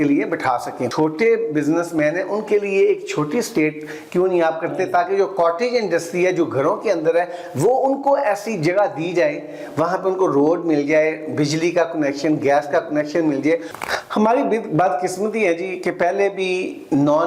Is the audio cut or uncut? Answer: cut